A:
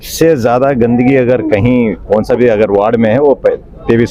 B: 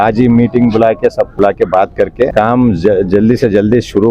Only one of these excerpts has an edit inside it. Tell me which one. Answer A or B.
B